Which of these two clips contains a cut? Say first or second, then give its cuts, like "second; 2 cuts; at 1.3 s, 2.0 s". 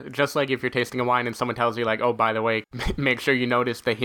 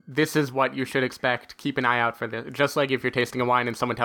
first; 1 cut; at 2.7 s